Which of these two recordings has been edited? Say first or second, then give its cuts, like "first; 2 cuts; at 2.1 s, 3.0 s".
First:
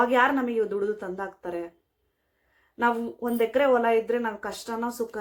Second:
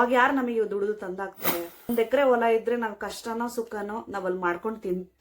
second; 1 cut; at 1.9 s